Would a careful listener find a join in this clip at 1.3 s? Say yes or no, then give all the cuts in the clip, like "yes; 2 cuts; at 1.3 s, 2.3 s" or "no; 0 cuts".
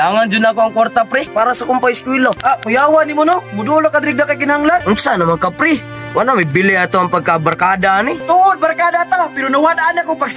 yes; 4 cuts; at 1.3 s, 2.4 s, 4.8 s, 8.2 s